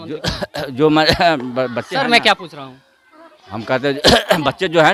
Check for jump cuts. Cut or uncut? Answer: uncut